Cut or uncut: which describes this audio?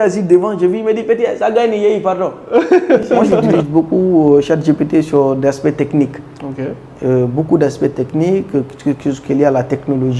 cut